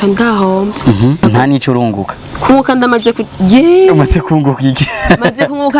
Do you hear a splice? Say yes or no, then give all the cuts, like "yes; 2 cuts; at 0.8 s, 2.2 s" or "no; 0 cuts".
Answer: yes; 1 cut; at 1.2 s